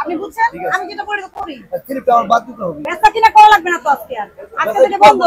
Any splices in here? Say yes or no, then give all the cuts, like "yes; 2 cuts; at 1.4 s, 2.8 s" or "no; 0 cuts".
yes; 1 cut; at 2.8 s